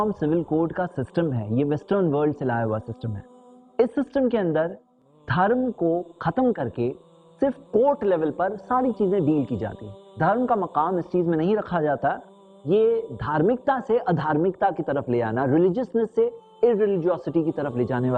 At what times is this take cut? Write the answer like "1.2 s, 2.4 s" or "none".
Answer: none